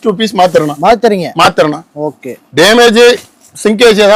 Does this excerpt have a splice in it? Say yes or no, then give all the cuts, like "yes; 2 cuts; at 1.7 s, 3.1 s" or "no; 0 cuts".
no; 0 cuts